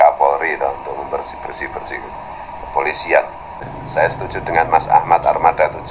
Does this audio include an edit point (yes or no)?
yes